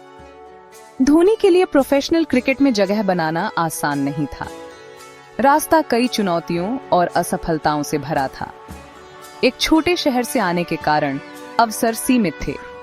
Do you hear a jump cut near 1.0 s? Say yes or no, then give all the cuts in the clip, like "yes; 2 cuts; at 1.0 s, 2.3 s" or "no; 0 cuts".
yes; 1 cut; at 1.0 s